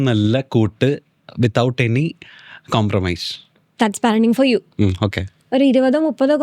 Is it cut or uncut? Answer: cut